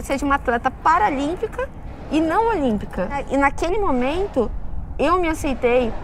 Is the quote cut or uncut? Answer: cut